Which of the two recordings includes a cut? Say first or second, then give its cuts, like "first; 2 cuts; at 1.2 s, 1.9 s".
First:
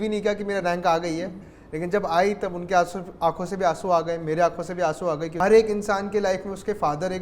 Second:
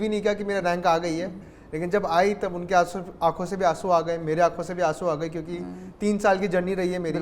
first; 1 cut; at 5.3 s